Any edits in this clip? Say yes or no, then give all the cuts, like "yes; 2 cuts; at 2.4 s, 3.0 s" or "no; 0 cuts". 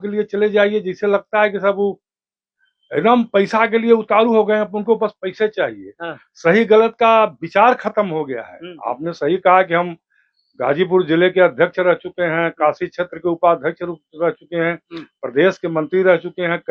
no; 0 cuts